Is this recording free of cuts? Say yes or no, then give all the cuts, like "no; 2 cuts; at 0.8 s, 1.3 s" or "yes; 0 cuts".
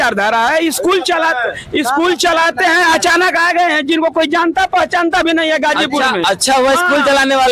yes; 0 cuts